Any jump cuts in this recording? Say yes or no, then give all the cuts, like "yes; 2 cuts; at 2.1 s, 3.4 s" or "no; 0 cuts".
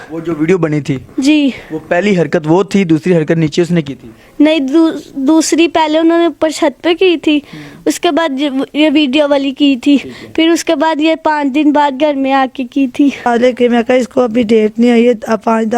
yes; 1 cut; at 13.3 s